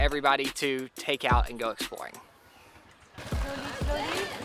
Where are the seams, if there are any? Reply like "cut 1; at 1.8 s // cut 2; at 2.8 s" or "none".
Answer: cut 1; at 2.8 s